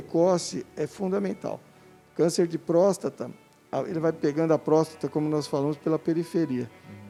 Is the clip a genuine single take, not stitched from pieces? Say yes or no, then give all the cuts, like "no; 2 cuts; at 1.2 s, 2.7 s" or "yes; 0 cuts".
yes; 0 cuts